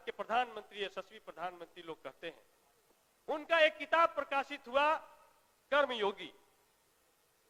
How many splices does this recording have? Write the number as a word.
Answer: zero